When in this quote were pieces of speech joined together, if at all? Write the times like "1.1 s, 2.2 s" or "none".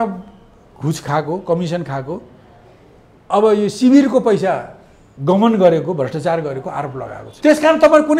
7.3 s